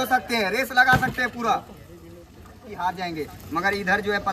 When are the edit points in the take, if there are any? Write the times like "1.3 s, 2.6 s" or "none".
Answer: 2.7 s